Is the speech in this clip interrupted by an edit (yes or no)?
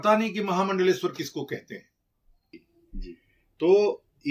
yes